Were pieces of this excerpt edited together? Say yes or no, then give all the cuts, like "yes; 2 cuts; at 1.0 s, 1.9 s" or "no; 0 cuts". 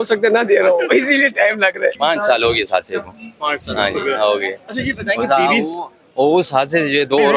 yes; 1 cut; at 2.0 s